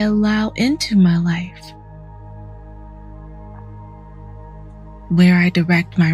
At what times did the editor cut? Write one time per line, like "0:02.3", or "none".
0:02.1
0:04.9